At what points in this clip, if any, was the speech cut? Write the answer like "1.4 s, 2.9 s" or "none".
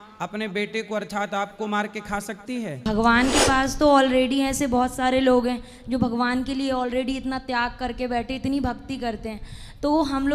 2.9 s